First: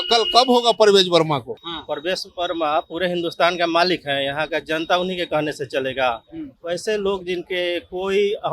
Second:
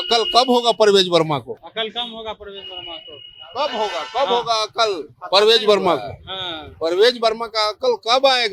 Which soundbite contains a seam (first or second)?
first